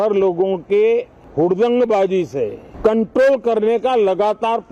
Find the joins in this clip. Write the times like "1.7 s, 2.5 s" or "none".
1.2 s, 2.6 s